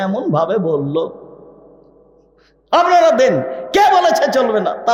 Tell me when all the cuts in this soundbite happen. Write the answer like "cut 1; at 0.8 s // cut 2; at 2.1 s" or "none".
none